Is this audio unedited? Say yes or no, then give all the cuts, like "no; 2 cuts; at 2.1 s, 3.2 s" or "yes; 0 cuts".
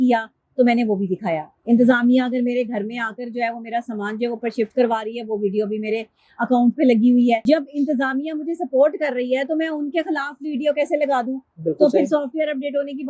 no; 1 cut; at 7.5 s